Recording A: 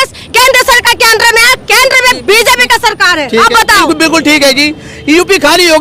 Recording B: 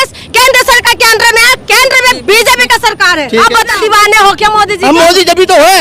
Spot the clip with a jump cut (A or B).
B